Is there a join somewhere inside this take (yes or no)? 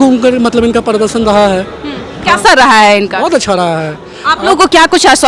no